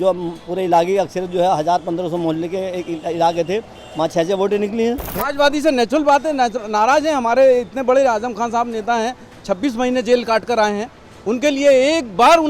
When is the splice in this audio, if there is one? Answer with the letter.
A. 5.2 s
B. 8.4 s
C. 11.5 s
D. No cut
A